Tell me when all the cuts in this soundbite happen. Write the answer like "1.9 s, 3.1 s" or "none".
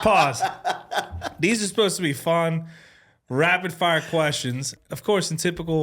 4.7 s